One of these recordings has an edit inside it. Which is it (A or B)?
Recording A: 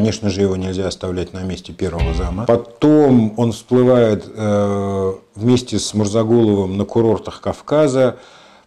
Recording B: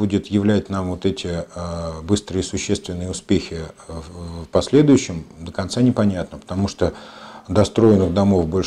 A